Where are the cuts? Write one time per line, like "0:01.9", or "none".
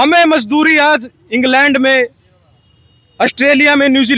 none